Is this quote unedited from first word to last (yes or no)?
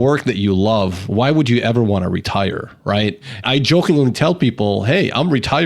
no